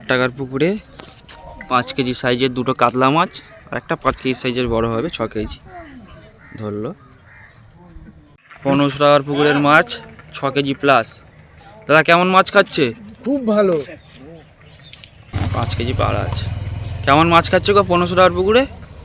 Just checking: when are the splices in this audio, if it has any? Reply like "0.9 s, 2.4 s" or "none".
8.3 s, 15.3 s